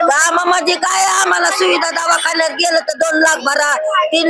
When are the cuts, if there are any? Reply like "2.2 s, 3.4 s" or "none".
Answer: none